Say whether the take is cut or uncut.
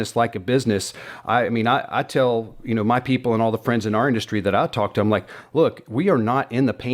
uncut